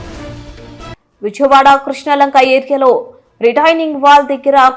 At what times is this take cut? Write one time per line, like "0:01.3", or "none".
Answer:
none